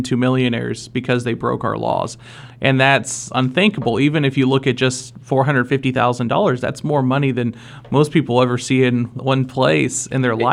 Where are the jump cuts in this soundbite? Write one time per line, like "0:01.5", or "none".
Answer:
none